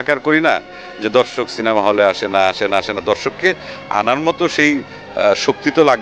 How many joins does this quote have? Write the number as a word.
zero